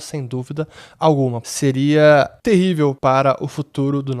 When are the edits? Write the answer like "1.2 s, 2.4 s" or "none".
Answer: 1.4 s, 3.0 s